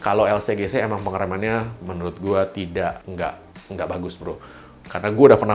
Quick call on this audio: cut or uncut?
uncut